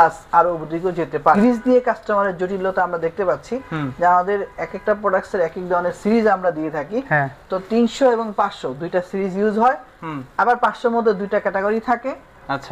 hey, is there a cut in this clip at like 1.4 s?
yes; 1 cut; at 1.4 s

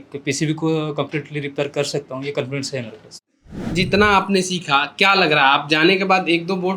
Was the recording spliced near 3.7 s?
yes; 1 cut; at 3.7 s

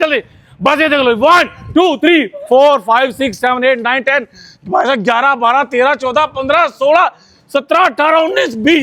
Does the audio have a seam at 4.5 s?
no; 0 cuts

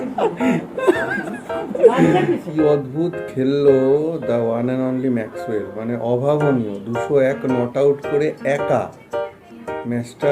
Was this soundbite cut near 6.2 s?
no; 1 cut; at 2.5 s

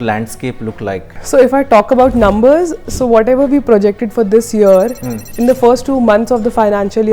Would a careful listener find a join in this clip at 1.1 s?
yes; 1 cut; at 1.1 s

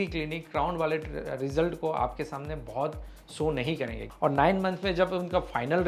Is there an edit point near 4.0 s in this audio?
yes; 1 cut; at 4.0 s

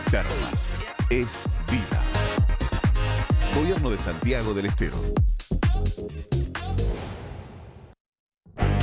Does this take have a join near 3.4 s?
no; 1 cut; at 7.9 s

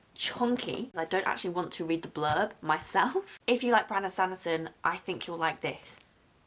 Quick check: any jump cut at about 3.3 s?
yes; 2 cuts; at 0.9 s, 3.3 s

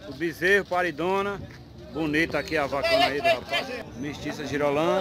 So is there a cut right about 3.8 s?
yes; 1 cut; at 3.8 s

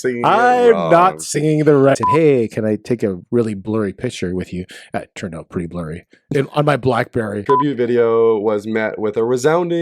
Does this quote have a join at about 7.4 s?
yes; 2 cuts; at 1.9 s, 7.4 s

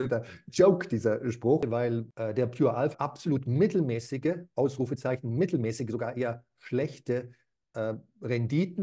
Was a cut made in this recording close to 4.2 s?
no; 2 cuts; at 1.6 s, 2.9 s

